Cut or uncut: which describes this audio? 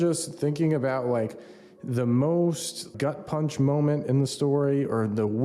cut